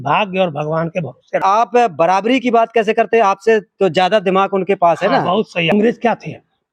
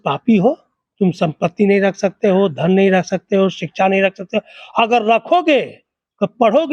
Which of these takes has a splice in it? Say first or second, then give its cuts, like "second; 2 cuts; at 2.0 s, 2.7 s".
first; 2 cuts; at 1.4 s, 5.7 s